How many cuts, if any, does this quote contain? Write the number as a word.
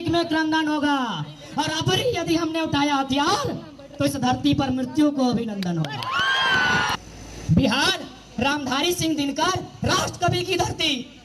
one